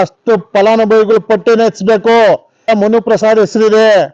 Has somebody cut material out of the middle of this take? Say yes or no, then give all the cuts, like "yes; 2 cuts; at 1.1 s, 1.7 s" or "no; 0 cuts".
yes; 1 cut; at 2.7 s